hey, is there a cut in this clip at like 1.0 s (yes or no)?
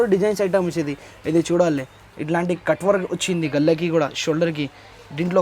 no